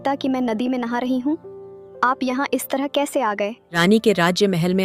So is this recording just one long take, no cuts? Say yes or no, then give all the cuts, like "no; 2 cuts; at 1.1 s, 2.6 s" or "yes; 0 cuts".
no; 1 cut; at 3.7 s